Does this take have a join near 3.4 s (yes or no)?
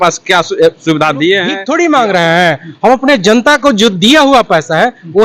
no